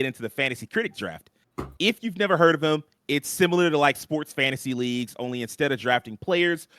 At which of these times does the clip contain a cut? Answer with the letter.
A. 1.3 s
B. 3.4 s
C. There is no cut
C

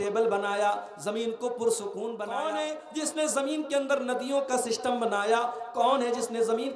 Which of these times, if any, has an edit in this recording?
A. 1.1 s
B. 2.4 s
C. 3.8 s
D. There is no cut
B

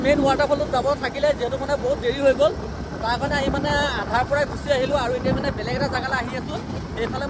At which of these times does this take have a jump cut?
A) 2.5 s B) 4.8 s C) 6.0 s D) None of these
D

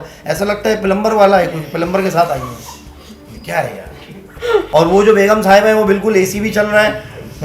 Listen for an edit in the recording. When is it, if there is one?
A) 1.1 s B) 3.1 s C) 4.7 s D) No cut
C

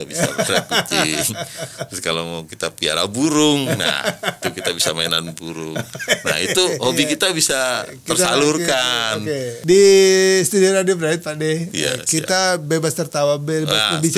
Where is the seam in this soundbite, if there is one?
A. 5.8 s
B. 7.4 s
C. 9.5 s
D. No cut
C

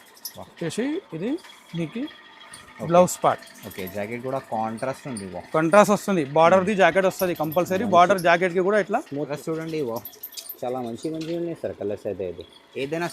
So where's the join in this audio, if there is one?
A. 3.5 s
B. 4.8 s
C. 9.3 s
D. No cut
C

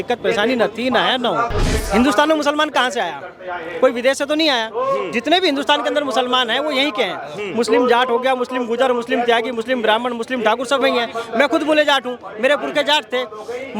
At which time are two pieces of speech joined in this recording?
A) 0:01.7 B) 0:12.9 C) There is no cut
A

